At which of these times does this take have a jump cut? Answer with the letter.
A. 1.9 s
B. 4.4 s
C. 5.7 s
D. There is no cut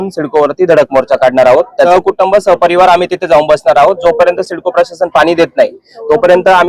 A